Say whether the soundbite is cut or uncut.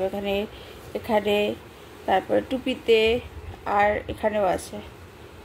uncut